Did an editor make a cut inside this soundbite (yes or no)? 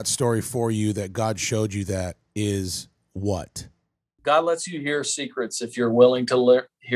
yes